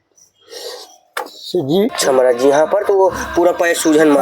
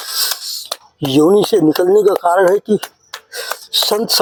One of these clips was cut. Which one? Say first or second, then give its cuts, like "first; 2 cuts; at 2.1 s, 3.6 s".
first; 1 cut; at 1.9 s